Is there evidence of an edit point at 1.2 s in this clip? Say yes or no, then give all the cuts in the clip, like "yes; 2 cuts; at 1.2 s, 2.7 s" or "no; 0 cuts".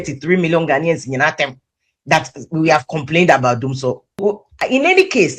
no; 1 cut; at 4.2 s